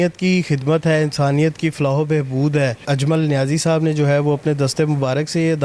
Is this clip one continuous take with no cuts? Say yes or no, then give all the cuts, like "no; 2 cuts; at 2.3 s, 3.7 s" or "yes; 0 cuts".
no; 1 cut; at 2.8 s